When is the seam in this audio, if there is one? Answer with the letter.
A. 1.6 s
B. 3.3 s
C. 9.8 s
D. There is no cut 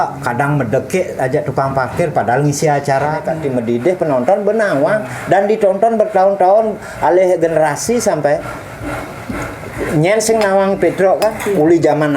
B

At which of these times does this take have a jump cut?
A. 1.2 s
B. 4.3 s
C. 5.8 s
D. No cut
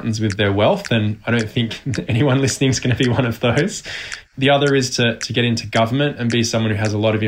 B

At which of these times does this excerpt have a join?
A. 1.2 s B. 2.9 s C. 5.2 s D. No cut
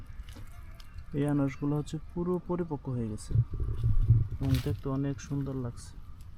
D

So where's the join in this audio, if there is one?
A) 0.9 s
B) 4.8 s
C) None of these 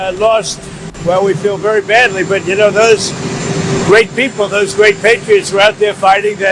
A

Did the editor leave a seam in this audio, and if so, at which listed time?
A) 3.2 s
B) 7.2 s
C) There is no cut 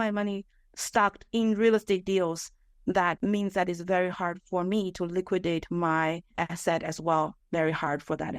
A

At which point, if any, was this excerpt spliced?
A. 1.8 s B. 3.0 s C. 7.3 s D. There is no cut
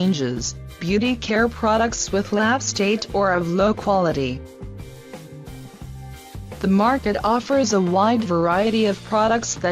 C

